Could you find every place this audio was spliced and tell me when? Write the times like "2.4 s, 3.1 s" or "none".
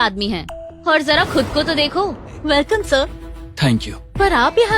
2.3 s